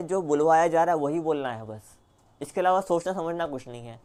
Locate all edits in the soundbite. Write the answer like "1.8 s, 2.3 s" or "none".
none